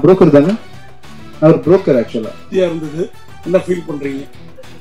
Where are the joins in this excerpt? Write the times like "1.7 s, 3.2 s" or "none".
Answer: 2.5 s

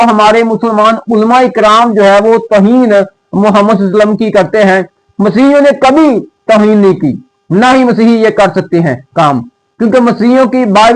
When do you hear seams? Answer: none

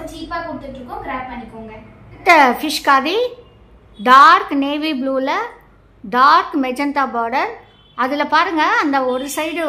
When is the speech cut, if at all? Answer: 2.2 s

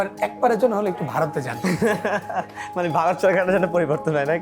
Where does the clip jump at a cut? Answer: none

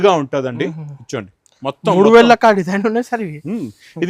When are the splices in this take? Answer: none

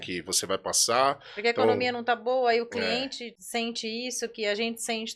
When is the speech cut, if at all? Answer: 3.3 s

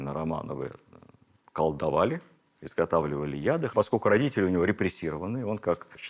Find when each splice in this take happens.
3.7 s

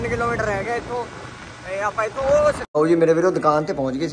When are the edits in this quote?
2.6 s

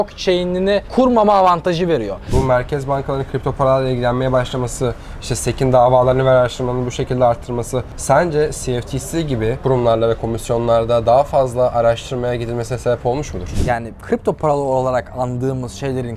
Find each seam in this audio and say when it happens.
2.2 s, 7.9 s, 9.6 s, 13.5 s

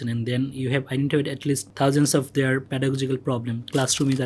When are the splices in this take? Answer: 1.7 s, 2.7 s

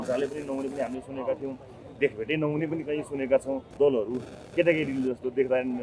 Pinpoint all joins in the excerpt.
3.7 s

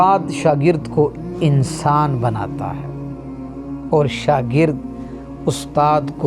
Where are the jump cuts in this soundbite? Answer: 2.4 s, 3.9 s

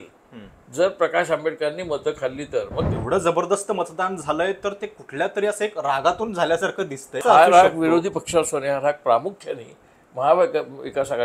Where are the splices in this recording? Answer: 2.9 s, 7.2 s

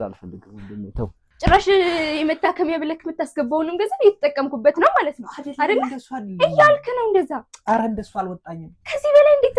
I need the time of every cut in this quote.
1.2 s

